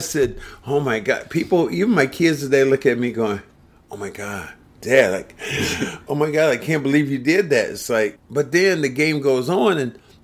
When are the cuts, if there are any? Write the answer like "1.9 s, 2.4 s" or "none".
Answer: 8.2 s

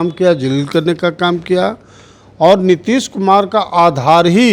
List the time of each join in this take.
none

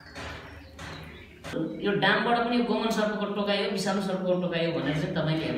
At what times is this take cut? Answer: 1.5 s

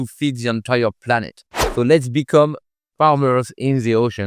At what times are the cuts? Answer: 1.7 s

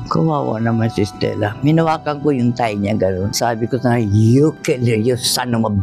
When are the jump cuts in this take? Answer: none

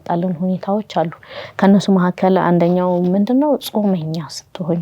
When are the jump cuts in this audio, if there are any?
none

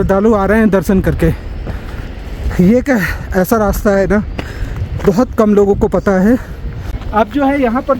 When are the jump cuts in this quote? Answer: 6.9 s

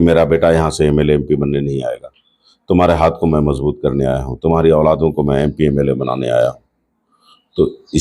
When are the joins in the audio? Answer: none

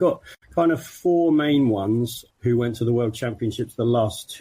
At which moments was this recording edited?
2.2 s

